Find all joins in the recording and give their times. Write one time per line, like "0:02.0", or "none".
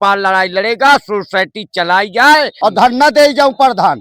0:02.5